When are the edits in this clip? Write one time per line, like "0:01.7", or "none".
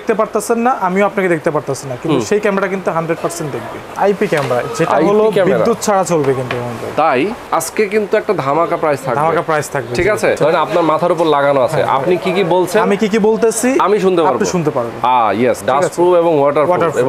0:03.9
0:07.4
0:10.4
0:15.6

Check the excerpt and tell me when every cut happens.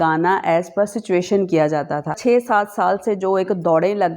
0:02.2

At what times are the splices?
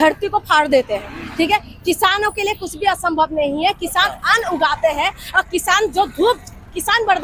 none

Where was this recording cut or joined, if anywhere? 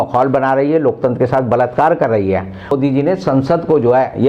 0:02.7

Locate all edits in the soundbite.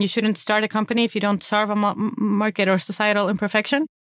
none

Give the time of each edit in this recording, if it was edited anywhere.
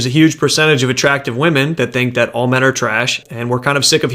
0:03.2

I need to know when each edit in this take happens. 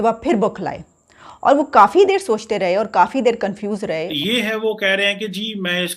0:04.1

